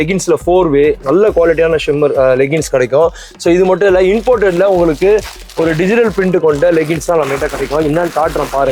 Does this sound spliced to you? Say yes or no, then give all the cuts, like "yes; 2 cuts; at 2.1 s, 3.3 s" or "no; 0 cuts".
no; 0 cuts